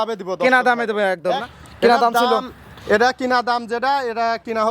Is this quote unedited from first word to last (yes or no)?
no